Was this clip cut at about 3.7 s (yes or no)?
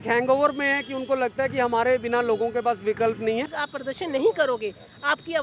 yes